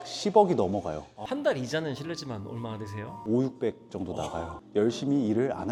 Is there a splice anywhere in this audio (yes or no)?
no